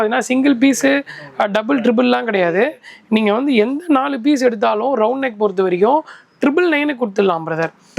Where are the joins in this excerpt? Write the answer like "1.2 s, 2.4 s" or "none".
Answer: none